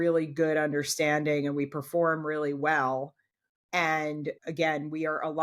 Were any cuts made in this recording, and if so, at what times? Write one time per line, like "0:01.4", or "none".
none